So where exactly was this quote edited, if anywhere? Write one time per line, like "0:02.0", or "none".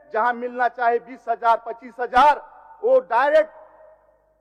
none